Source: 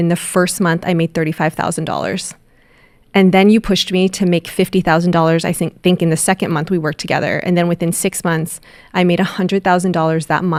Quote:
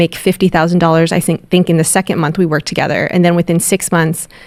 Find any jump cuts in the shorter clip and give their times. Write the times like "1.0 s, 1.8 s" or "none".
none